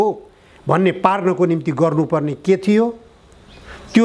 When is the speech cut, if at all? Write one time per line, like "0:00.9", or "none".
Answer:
none